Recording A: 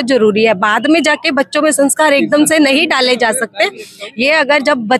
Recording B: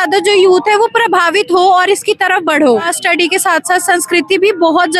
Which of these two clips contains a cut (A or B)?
B